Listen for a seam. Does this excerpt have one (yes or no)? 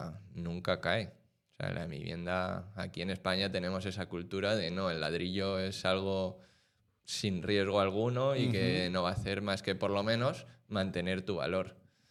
no